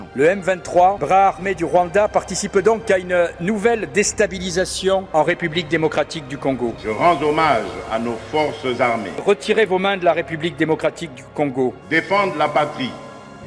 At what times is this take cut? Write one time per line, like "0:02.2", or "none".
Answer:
none